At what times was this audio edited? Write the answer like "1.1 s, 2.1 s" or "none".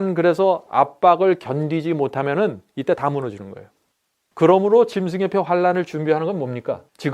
none